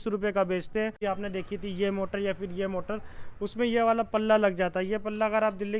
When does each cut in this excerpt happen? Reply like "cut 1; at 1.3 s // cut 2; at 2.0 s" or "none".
cut 1; at 1.0 s